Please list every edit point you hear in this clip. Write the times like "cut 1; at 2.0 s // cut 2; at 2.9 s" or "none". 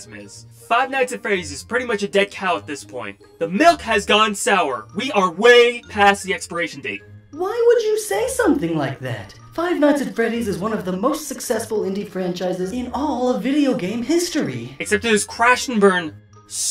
cut 1; at 2.7 s